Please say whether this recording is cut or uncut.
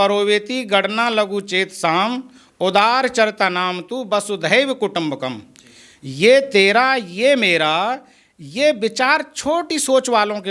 uncut